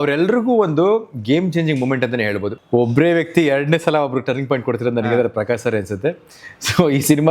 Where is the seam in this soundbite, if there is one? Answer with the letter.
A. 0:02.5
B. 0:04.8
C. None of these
A